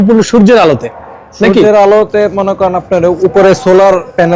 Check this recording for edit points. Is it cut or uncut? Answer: uncut